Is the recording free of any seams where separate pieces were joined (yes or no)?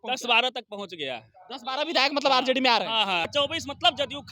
no